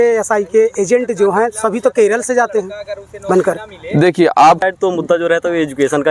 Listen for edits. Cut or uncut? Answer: cut